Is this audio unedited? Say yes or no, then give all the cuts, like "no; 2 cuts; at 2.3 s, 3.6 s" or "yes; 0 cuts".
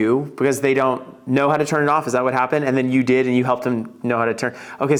yes; 0 cuts